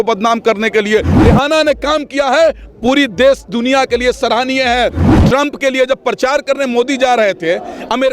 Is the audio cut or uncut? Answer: cut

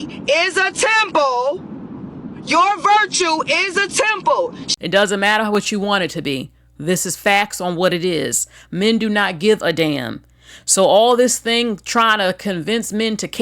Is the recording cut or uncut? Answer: cut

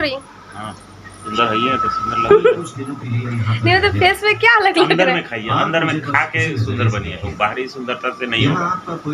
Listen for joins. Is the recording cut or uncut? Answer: cut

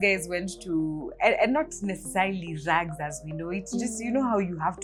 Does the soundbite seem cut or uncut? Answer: uncut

